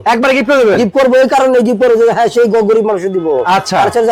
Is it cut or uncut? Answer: uncut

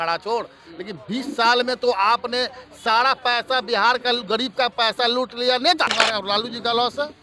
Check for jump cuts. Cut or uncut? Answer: cut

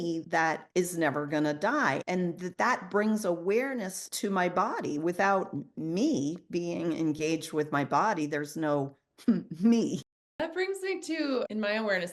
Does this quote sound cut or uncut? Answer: cut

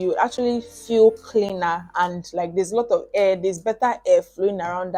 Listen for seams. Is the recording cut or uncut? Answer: uncut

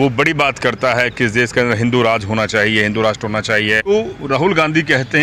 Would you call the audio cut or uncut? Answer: cut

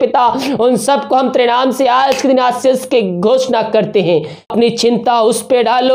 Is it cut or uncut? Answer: cut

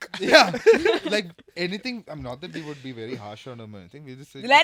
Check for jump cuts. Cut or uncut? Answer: uncut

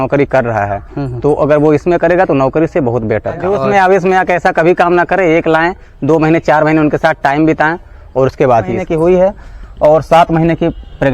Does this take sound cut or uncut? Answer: cut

